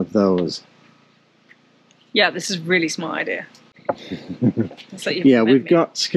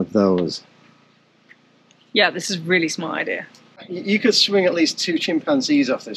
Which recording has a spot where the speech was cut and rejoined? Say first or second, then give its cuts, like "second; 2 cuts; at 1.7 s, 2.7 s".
second; 1 cut; at 3.8 s